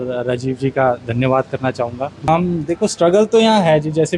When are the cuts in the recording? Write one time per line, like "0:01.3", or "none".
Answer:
0:02.3